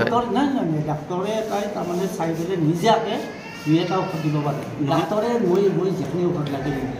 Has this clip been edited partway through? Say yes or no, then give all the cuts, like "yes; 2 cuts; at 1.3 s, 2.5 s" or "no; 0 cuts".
yes; 1 cut; at 4.9 s